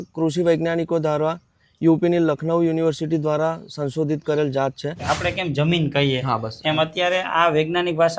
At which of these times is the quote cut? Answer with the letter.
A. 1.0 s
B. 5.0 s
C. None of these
B